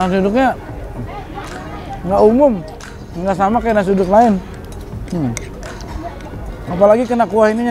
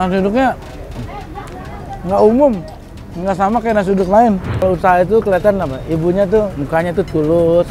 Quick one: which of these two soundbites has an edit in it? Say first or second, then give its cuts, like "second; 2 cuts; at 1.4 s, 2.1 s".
second; 2 cuts; at 4.5 s, 6.6 s